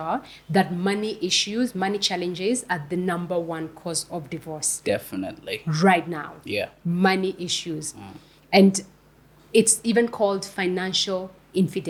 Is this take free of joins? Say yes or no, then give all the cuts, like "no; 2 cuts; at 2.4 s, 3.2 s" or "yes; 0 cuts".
yes; 0 cuts